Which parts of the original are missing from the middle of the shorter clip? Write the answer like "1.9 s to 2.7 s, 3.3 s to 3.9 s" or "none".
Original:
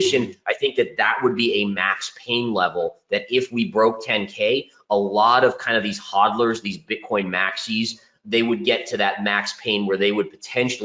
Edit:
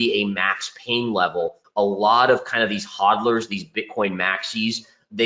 3.0 s to 4.7 s

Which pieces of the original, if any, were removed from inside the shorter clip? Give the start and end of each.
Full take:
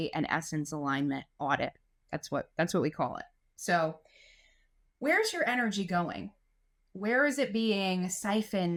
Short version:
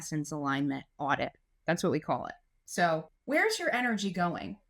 2.0 s to 2.5 s, 4.0 s to 4.9 s

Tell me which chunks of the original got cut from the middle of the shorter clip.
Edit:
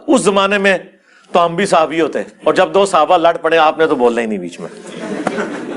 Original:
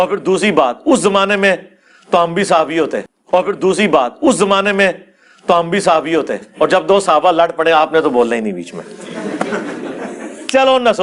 3.0 s to 6.4 s

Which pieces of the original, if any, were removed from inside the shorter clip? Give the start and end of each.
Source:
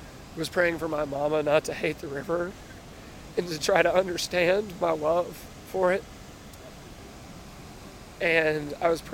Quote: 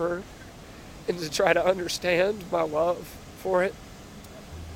none

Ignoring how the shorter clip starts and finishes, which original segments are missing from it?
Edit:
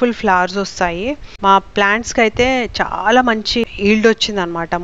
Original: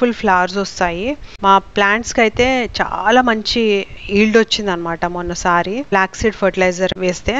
3.6 s to 3.9 s

